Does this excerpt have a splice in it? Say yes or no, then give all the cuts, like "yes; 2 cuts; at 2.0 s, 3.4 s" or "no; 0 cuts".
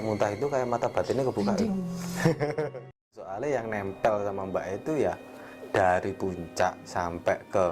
yes; 1 cut; at 3.3 s